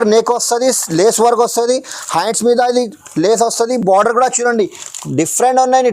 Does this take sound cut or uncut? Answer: uncut